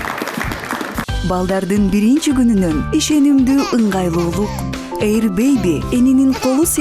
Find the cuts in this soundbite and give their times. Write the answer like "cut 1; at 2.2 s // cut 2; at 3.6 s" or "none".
cut 1; at 1.0 s